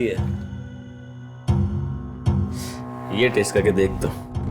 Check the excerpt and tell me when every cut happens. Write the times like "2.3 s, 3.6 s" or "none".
none